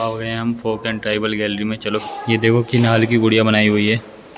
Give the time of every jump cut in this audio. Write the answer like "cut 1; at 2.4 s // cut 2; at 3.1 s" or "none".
cut 1; at 2.1 s